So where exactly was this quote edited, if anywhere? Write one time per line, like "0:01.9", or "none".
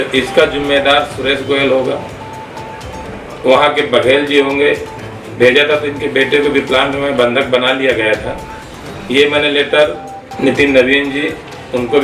0:05.3
0:10.1